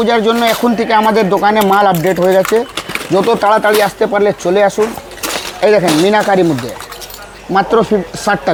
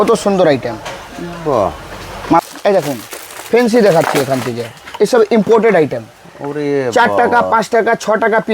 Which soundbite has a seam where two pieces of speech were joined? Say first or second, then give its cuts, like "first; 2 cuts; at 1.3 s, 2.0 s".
second; 1 cut; at 2.4 s